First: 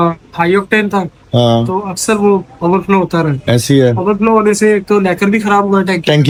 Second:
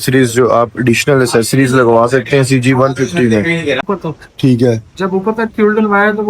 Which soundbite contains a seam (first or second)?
second